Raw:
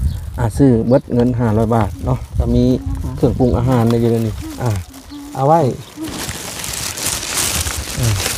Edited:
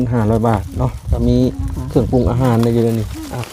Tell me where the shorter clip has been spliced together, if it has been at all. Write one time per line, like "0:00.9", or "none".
none